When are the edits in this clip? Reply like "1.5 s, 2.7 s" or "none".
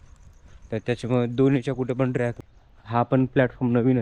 2.4 s